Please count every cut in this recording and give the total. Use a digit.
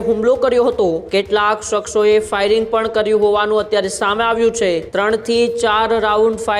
2